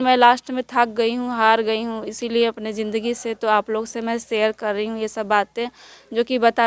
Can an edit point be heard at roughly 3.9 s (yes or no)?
no